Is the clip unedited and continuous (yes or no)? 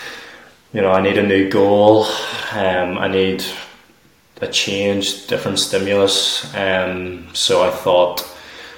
yes